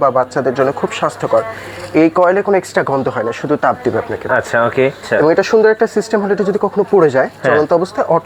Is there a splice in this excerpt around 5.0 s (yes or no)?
yes